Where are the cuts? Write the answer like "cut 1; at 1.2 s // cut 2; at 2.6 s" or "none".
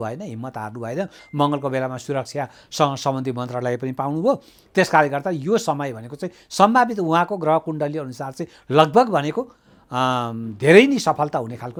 none

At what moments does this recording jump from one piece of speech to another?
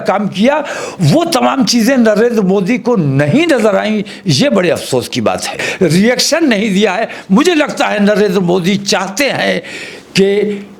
cut 1; at 5.6 s

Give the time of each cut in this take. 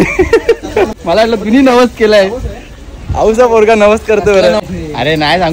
cut 1; at 0.9 s // cut 2; at 4.6 s

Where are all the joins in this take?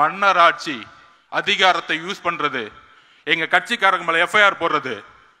none

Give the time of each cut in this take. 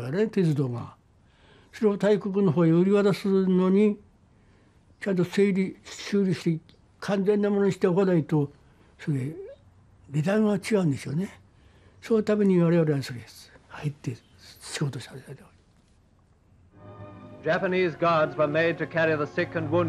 cut 1; at 8.5 s

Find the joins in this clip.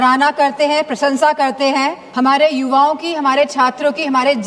cut 1; at 2.0 s

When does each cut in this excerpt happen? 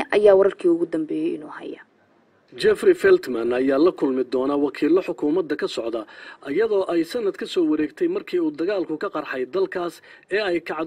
none

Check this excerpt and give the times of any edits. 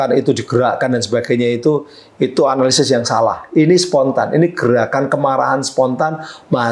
none

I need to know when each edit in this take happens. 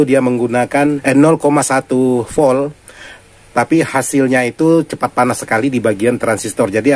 cut 1; at 1.0 s

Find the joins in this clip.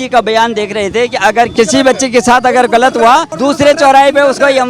cut 1; at 1.5 s // cut 2; at 3.3 s

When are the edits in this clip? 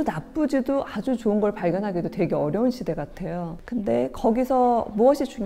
none

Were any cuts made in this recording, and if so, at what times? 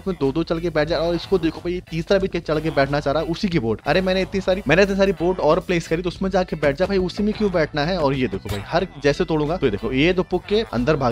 none

